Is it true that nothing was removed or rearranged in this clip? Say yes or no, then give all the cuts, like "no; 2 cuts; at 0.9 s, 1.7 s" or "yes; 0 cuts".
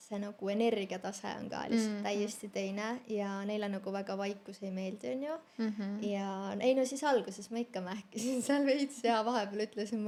yes; 0 cuts